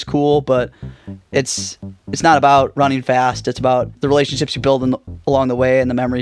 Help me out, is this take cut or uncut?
cut